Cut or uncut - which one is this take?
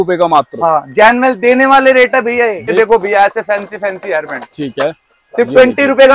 cut